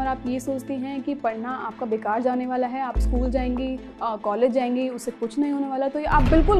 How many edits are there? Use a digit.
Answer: 0